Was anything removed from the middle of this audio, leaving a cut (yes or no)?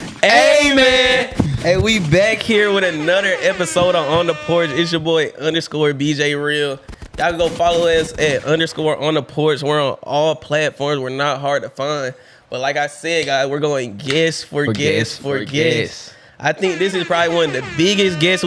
no